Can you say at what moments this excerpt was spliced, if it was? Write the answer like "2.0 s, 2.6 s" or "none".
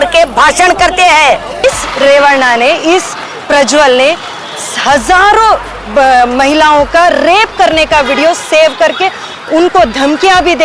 1.6 s